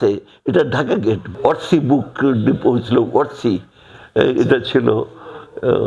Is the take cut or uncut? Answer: cut